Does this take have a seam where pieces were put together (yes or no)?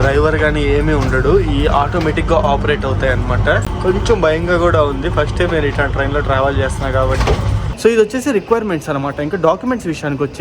yes